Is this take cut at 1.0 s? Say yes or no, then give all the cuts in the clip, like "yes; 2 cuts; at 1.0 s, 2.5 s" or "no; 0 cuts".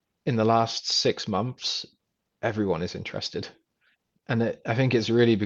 no; 0 cuts